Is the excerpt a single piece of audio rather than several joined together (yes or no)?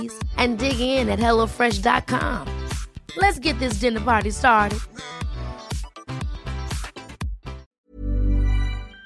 no